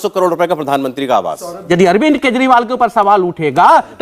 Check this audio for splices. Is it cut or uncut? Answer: cut